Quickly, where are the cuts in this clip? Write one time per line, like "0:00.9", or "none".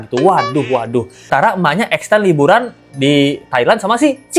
0:01.3